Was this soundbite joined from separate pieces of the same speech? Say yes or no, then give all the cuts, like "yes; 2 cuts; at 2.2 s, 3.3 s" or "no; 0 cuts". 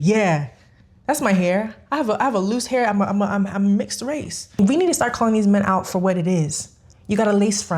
yes; 1 cut; at 4.6 s